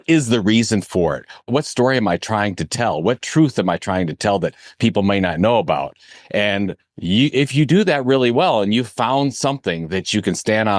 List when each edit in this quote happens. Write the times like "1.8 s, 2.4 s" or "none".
1.4 s